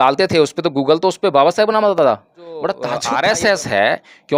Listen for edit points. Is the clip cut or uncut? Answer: cut